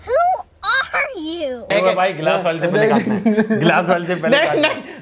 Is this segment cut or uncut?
cut